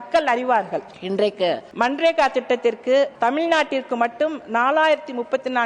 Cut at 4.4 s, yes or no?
no